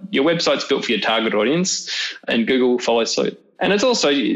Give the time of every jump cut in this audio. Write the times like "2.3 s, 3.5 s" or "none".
2.2 s, 3.4 s